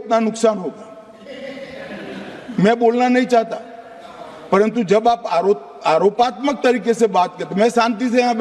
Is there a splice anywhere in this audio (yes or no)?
no